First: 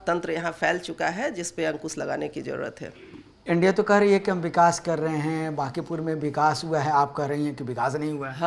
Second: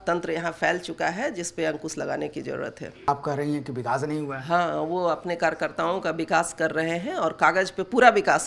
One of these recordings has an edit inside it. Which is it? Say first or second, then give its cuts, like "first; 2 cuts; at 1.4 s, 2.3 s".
second; 1 cut; at 3.1 s